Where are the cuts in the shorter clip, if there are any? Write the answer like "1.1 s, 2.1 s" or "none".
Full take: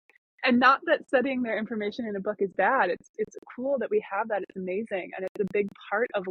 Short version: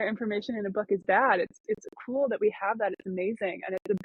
none

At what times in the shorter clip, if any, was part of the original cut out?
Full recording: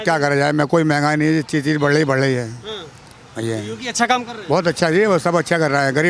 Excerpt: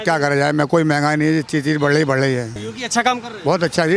2.7 s

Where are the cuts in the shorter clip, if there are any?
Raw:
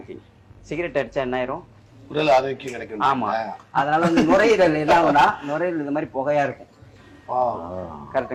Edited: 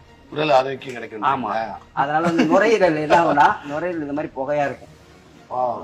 none

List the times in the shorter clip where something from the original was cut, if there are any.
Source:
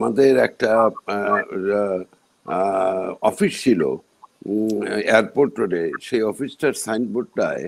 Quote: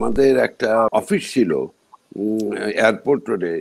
0.9 s

